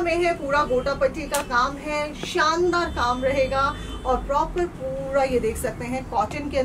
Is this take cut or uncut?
uncut